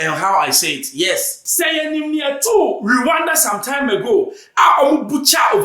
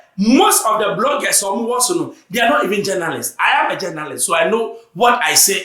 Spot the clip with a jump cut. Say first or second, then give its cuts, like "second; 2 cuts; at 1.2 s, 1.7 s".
first; 1 cut; at 1.4 s